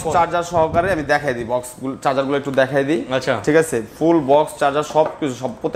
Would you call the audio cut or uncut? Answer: uncut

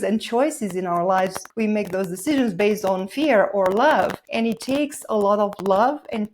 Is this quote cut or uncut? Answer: cut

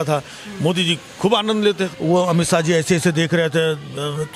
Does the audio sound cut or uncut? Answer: cut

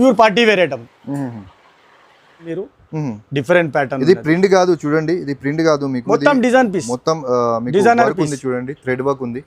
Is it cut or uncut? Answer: cut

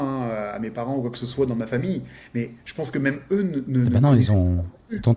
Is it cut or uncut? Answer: uncut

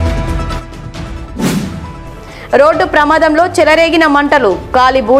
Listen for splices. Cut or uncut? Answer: cut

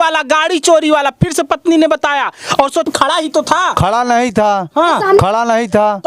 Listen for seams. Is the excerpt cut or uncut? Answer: cut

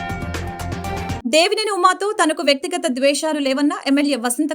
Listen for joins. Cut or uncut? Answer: cut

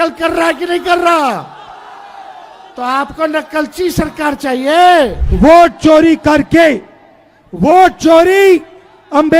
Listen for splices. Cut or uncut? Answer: cut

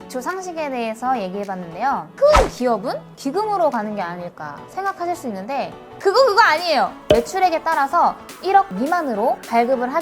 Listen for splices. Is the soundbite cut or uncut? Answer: cut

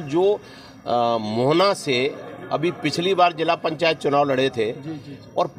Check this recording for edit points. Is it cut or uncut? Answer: uncut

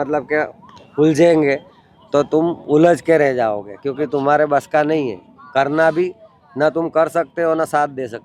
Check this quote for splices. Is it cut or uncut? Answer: uncut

